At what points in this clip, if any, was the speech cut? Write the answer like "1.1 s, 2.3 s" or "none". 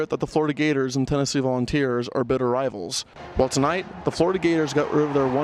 3.2 s